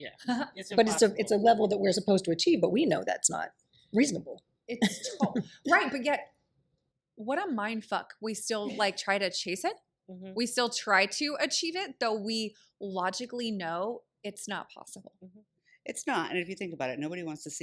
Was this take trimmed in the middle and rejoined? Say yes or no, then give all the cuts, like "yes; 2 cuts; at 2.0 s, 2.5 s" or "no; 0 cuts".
no; 0 cuts